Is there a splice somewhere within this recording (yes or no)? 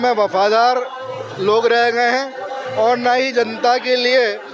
no